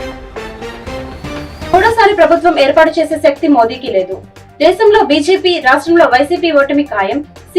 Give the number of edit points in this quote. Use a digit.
1